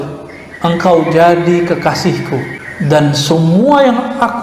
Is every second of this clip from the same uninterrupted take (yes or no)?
no